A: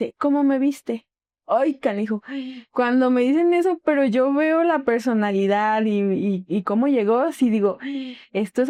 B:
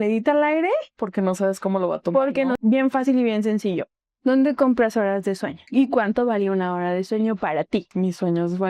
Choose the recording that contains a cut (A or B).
B